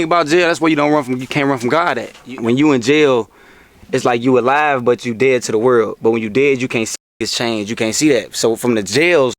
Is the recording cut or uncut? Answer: cut